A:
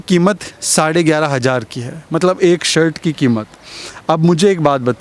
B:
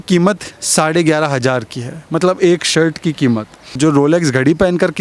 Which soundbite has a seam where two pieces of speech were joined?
B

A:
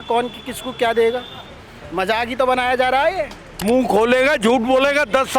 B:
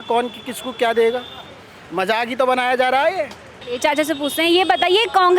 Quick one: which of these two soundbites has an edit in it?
A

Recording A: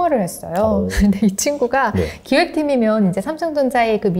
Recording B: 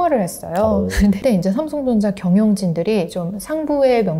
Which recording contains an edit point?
B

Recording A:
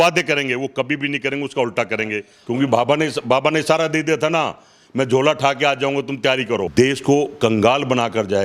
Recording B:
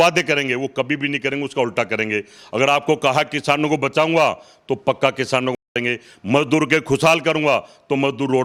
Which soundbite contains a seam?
A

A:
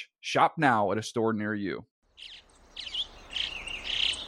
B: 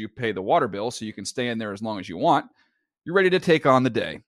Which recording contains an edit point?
A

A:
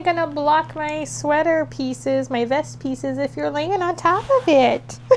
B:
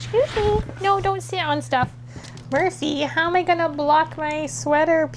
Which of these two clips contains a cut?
B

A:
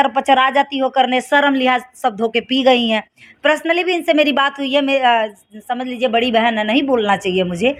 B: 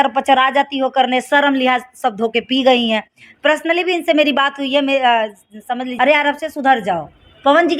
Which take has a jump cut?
B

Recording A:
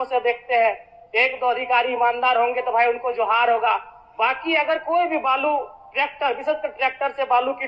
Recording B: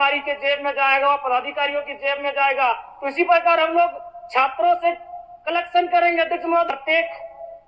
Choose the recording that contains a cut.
B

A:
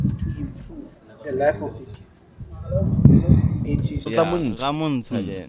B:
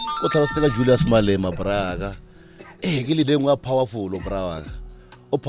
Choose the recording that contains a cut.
A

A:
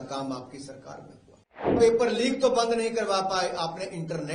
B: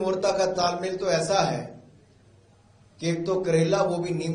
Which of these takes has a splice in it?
A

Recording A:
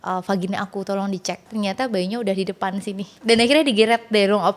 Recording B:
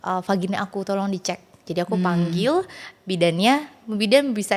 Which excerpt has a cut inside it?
A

